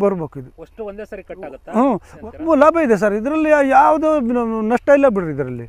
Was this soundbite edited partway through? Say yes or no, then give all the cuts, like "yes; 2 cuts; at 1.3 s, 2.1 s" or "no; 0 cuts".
yes; 1 cut; at 2.1 s